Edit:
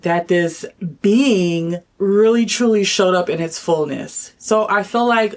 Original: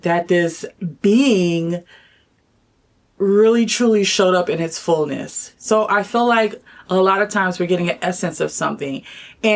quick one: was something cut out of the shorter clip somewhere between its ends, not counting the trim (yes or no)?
yes